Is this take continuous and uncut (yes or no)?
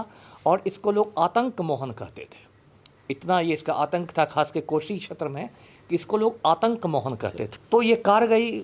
yes